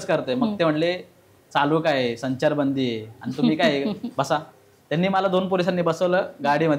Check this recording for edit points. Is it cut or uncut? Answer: uncut